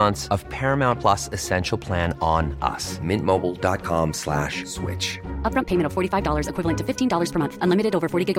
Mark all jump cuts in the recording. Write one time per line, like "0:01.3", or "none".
none